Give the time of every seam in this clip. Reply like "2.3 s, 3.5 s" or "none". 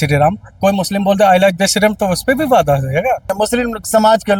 3.3 s